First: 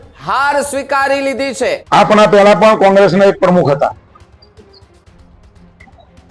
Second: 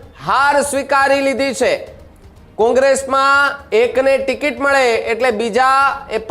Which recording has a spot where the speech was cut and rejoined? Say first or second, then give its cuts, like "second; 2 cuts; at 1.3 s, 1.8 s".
first; 1 cut; at 1.8 s